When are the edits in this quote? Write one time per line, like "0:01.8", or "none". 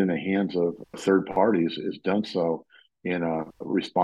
none